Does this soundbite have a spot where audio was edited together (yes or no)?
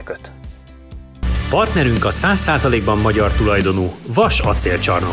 yes